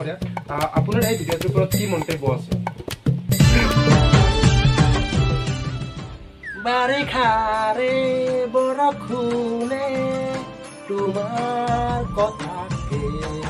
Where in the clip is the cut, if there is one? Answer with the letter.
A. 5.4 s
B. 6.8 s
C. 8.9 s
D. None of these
D